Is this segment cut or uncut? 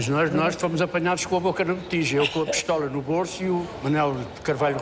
cut